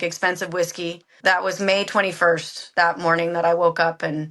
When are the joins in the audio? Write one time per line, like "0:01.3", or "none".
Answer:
0:01.1